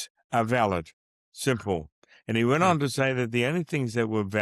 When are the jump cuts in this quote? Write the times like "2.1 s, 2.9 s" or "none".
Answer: none